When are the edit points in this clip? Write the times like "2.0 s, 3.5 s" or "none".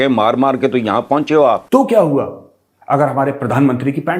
1.6 s